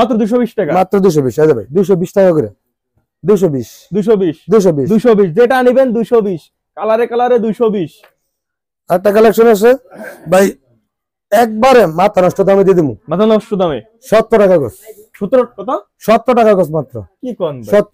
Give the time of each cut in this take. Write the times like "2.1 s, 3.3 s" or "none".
none